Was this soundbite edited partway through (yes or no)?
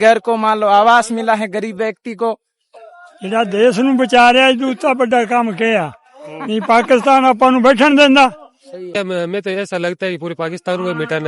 yes